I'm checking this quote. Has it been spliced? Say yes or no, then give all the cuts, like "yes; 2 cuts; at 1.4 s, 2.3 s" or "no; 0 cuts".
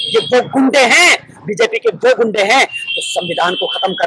no; 0 cuts